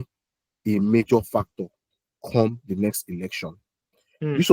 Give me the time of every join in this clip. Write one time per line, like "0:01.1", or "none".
none